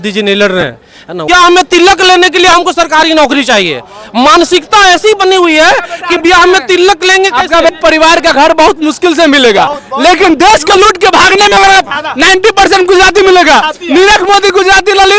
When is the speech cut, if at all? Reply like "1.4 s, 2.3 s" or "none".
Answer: 1.3 s, 7.7 s